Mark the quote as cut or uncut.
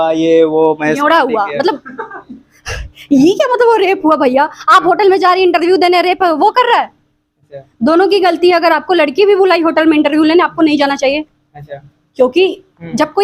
uncut